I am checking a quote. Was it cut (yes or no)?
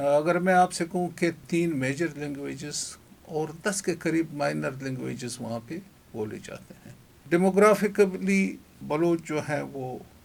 no